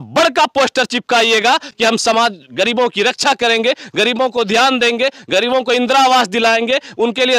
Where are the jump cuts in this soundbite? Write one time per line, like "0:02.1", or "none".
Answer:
none